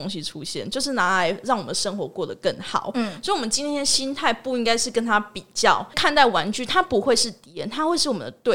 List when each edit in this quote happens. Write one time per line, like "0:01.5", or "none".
0:05.9